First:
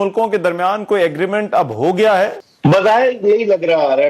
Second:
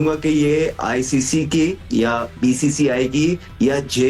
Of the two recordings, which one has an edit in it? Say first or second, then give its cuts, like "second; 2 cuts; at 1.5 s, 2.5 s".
first; 1 cut; at 2.5 s